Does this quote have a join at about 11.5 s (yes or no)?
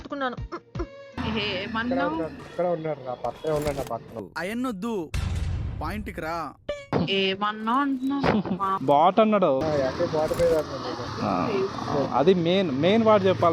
no